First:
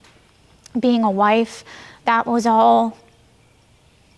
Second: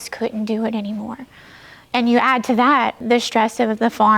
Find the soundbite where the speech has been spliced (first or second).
second